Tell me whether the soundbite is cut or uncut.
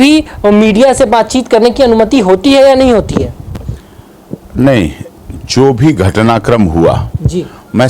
uncut